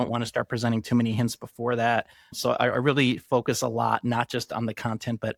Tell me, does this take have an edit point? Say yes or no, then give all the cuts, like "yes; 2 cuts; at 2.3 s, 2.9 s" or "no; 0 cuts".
no; 0 cuts